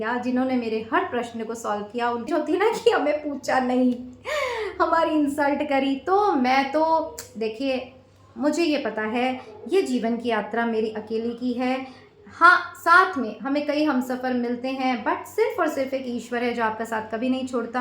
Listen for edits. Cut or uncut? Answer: cut